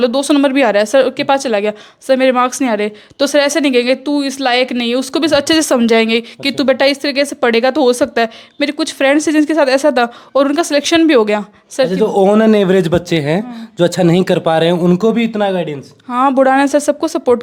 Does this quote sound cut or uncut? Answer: uncut